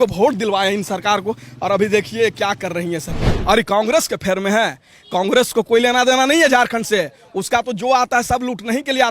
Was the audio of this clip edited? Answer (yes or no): yes